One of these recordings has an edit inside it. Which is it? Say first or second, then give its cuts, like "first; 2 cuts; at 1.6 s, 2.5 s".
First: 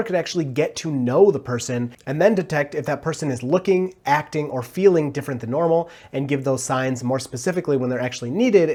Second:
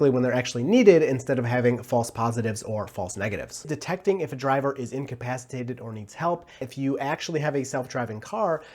second; 2 cuts; at 3.7 s, 6.6 s